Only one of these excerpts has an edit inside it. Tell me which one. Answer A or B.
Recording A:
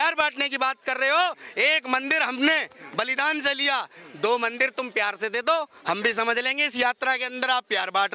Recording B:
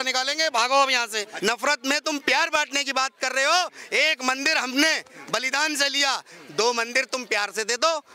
B